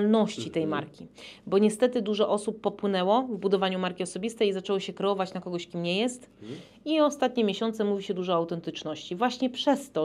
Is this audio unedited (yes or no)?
yes